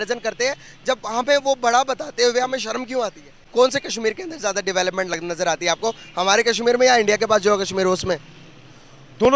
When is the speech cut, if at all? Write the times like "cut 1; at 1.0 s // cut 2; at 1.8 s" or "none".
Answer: cut 1; at 3.3 s